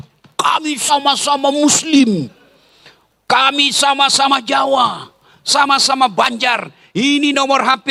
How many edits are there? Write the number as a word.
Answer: zero